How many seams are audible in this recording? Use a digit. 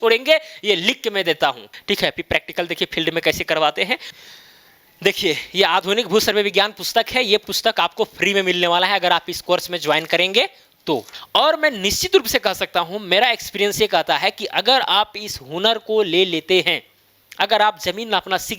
3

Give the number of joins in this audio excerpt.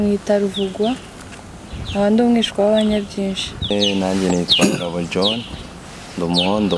1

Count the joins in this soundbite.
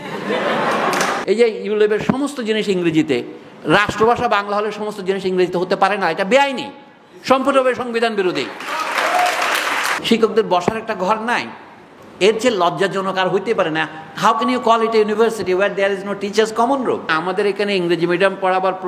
3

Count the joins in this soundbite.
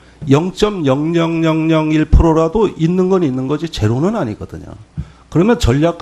1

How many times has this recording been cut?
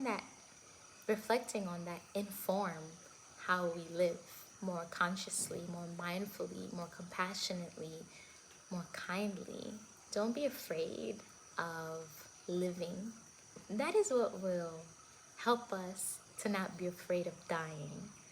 2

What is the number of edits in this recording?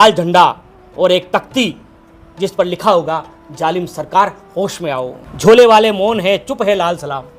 1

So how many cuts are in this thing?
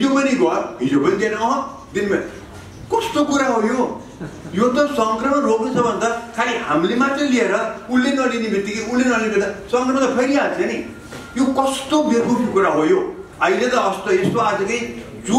1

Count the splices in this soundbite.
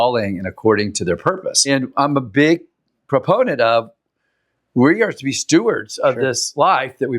1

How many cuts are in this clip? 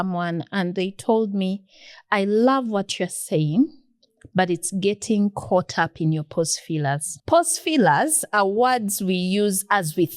1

